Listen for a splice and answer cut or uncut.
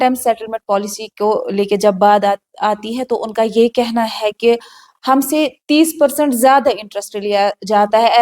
uncut